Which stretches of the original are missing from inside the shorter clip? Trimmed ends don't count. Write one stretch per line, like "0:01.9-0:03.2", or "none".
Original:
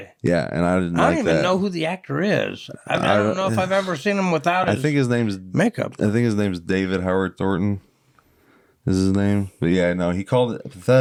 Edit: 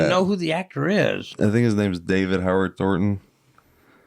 0:02.6-0:05.9